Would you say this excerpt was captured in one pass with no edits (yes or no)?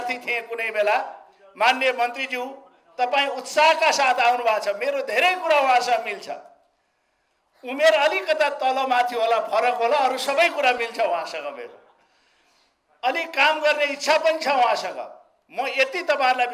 yes